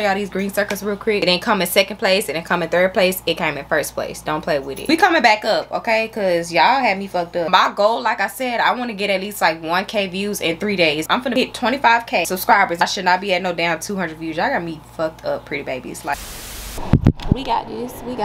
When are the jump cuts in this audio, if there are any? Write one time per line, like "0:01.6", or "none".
0:01.2
0:04.8
0:07.5
0:11.2
0:12.5
0:16.3